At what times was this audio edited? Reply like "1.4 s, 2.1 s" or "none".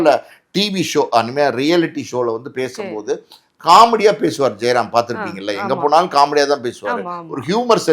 none

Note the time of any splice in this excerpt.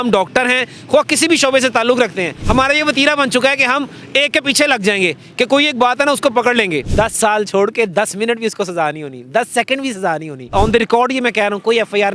2.3 s, 6.9 s, 10.4 s

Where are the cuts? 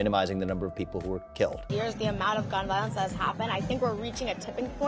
1.6 s

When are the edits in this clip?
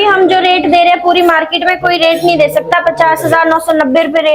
none

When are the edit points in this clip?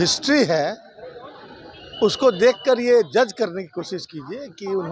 none

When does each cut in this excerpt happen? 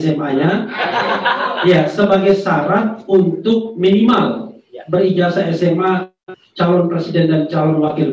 none

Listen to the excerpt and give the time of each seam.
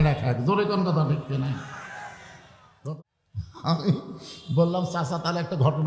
2.8 s

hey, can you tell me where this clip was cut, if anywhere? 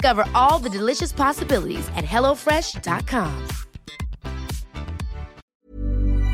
5.4 s

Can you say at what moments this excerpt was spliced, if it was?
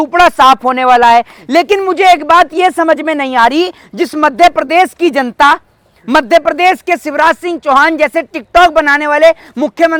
none

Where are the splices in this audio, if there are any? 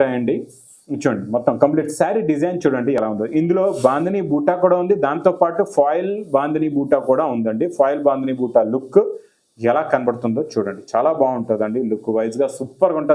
none

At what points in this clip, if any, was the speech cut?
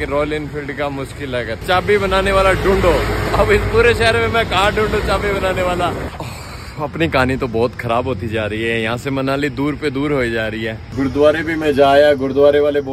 1.6 s, 6.1 s, 10.8 s

